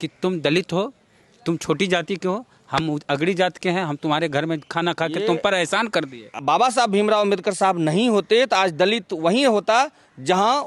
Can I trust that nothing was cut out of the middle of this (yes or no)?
no